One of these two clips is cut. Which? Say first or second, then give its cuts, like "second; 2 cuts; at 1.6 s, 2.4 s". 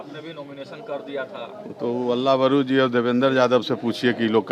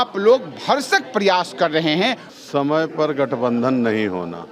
second; 1 cut; at 2.3 s